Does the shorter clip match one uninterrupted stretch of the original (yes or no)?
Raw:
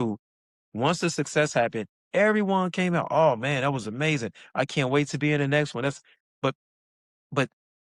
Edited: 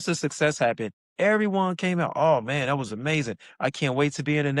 yes